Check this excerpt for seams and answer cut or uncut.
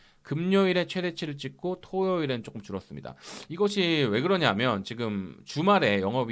uncut